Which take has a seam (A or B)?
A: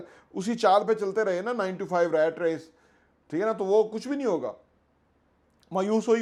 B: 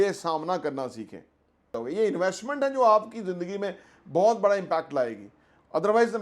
B